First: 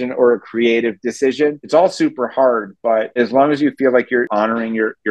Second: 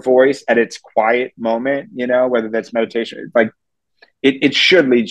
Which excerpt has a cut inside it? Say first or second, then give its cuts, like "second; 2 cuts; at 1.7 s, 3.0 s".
first; 3 cuts; at 1.6 s, 3.2 s, 4.3 s